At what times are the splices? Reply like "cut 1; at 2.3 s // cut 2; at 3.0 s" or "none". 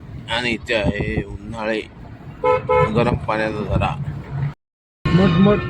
cut 1; at 4.5 s